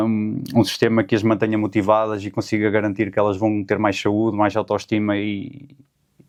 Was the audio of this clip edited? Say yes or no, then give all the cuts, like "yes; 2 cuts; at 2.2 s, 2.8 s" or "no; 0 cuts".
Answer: no; 0 cuts